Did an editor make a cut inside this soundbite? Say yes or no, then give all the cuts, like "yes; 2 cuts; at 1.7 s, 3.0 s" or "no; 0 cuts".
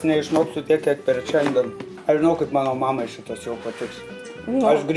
yes; 1 cut; at 1.9 s